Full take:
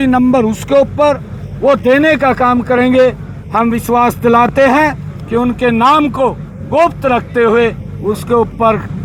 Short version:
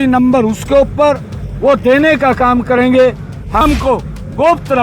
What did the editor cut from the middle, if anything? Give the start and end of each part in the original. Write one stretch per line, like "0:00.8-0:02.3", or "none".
0:03.6-0:05.9